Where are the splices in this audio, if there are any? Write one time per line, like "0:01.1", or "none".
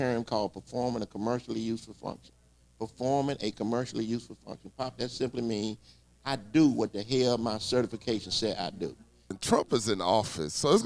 0:09.3